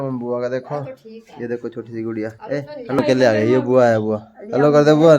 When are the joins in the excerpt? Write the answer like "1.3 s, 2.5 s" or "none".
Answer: 3.0 s